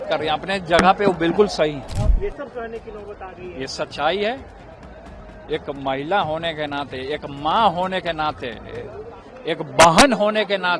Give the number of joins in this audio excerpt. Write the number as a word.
one